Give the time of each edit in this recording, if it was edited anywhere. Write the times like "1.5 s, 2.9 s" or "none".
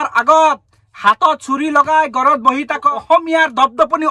2.9 s